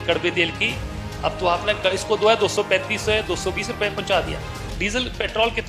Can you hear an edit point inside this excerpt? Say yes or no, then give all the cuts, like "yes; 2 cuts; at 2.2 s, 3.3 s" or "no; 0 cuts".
yes; 1 cut; at 4.7 s